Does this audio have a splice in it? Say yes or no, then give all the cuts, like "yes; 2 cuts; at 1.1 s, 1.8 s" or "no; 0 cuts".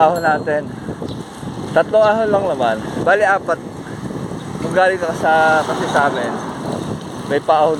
no; 0 cuts